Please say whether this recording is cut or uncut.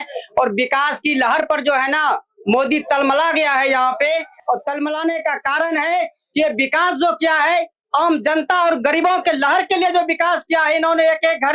uncut